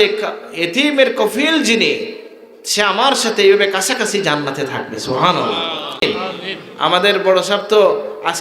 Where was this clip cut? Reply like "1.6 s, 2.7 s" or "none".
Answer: 6.0 s